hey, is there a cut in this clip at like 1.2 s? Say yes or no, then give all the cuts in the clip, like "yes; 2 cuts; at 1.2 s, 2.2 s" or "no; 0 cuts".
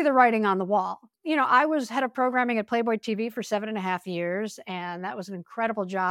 yes; 1 cut; at 1.2 s